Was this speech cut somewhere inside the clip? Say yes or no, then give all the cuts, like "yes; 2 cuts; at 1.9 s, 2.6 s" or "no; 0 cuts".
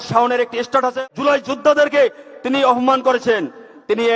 yes; 1 cut; at 0.9 s